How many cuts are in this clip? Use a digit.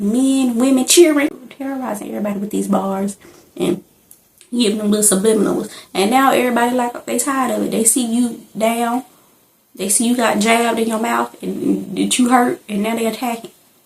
1